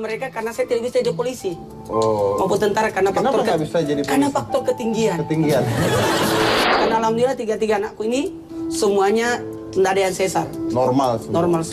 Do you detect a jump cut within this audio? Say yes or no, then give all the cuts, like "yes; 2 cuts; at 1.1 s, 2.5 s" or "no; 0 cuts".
yes; 1 cut; at 6.6 s